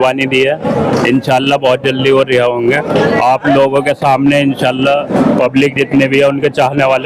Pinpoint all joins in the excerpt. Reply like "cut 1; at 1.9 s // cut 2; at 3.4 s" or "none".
none